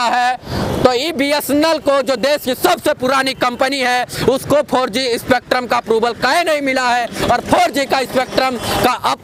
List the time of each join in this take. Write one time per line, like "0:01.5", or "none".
none